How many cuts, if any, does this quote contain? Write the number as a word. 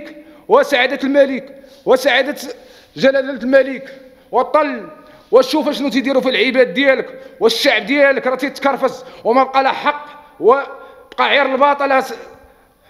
zero